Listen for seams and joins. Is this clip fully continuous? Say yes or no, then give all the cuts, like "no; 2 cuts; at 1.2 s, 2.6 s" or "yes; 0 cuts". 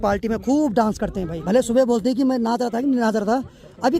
no; 1 cut; at 1.3 s